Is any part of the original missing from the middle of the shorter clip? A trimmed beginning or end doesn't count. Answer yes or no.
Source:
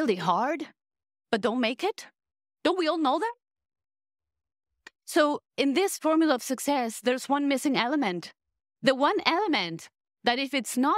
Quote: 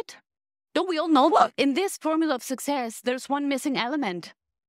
yes